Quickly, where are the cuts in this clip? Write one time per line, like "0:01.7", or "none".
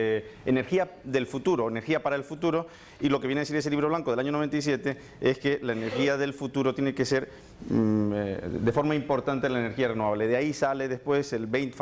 0:04.5